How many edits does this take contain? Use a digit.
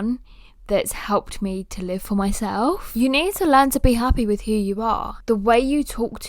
2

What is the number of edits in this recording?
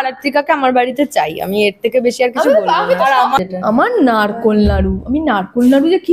1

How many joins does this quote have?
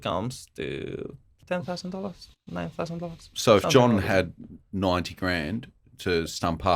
1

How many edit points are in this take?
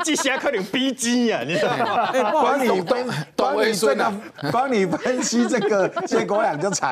0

